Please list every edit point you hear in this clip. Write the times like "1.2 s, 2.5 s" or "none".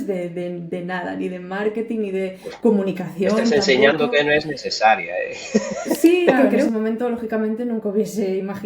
6.7 s